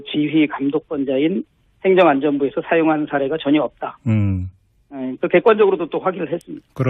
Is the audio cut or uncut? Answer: cut